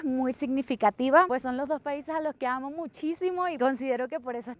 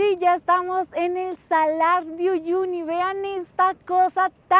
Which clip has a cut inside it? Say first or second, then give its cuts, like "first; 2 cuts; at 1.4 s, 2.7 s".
first; 2 cuts; at 1.3 s, 3.6 s